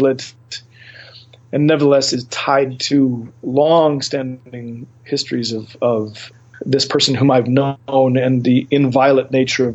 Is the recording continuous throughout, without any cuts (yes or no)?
no